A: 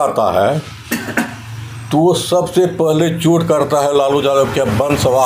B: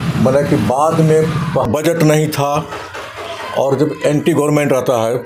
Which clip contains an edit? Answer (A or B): B